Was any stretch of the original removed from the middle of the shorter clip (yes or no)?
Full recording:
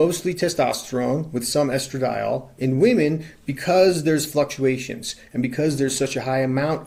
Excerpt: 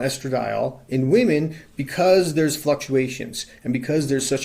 no